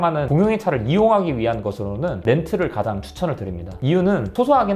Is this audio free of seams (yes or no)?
yes